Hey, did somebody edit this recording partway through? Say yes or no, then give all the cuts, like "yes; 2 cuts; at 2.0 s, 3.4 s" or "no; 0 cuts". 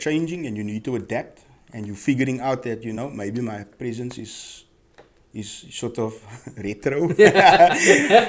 no; 0 cuts